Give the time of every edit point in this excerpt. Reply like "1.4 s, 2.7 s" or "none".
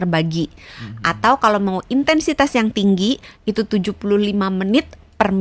none